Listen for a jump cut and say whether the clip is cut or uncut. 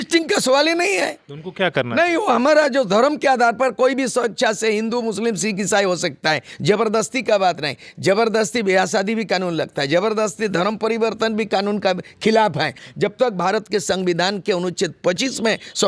cut